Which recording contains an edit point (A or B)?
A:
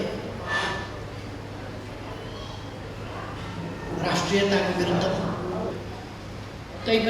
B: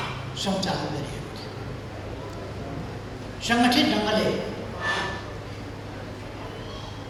A